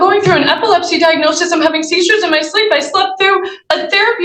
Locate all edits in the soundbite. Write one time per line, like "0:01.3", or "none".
none